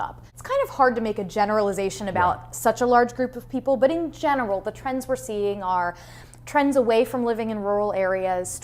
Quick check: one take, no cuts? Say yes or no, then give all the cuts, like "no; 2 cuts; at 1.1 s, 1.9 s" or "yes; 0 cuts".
no; 1 cut; at 2.3 s